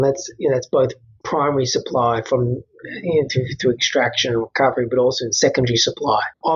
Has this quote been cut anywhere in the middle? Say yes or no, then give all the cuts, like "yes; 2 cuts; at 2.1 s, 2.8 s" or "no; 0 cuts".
no; 0 cuts